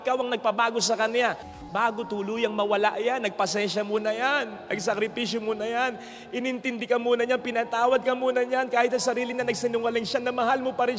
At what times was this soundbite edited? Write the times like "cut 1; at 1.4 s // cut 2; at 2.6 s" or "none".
cut 1; at 1.6 s